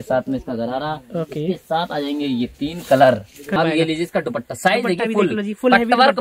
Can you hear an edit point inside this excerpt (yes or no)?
yes